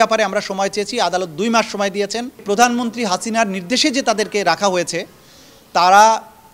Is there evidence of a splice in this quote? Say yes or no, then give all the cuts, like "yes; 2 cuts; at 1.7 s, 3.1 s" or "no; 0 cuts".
yes; 1 cut; at 2.4 s